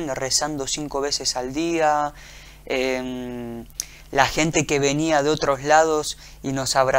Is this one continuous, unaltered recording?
yes; 0 cuts

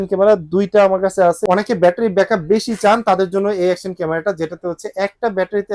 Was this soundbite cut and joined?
yes; 1 cut; at 1.4 s

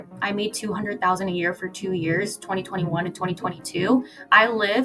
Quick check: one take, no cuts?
yes; 0 cuts

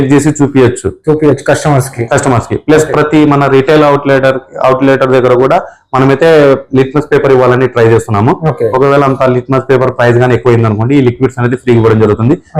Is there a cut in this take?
no; 0 cuts

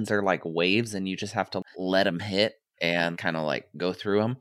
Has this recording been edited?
no; 0 cuts

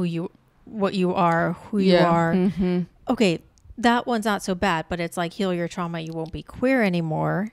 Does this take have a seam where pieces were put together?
no; 0 cuts

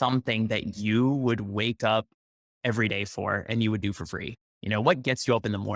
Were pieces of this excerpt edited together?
no; 0 cuts

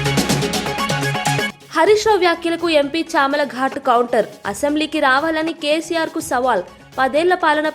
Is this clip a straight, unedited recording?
no; 1 cut; at 1.4 s

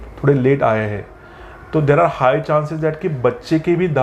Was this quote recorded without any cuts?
yes; 0 cuts

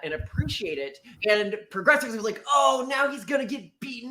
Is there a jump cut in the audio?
yes; 1 cut; at 1.1 s

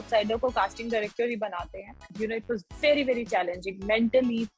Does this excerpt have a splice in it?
yes; 1 cut; at 2.1 s

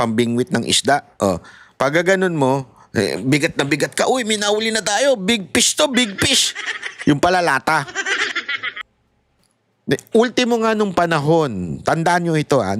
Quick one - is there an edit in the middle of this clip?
yes; 1 cut; at 8.9 s

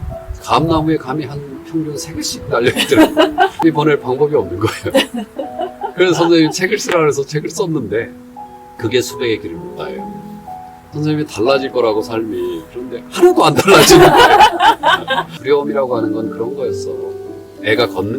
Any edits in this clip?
yes; 2 cuts; at 3.6 s, 15.3 s

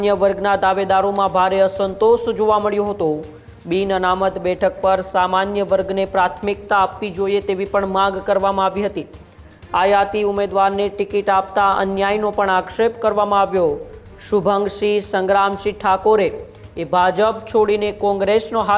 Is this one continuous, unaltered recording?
yes; 0 cuts

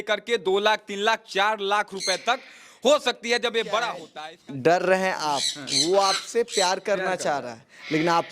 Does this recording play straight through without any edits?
no; 1 cut; at 4.1 s

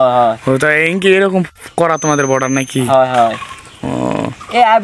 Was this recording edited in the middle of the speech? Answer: no; 0 cuts

